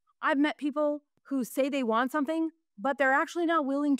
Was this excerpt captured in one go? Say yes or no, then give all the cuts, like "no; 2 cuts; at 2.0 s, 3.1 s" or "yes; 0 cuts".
yes; 0 cuts